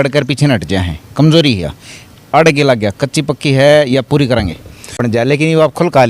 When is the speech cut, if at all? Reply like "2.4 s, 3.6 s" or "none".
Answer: 5.0 s